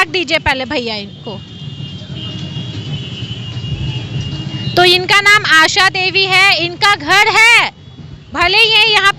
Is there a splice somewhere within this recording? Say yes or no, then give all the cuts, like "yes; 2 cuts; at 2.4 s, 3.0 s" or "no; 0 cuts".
no; 0 cuts